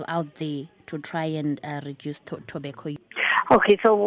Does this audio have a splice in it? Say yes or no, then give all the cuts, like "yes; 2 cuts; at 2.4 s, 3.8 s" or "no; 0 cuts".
yes; 1 cut; at 3.0 s